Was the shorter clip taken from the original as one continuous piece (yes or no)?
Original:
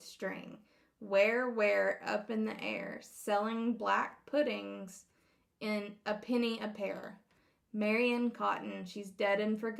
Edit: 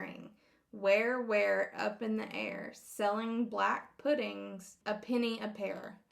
no